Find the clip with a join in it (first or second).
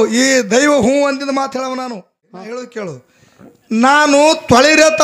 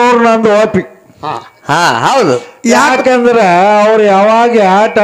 first